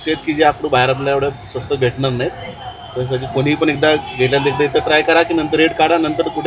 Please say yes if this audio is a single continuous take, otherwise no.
yes